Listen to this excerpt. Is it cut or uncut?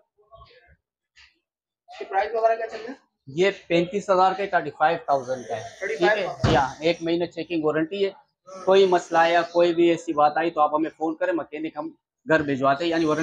uncut